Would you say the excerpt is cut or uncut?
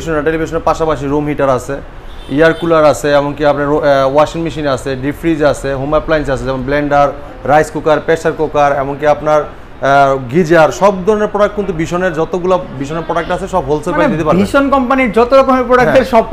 uncut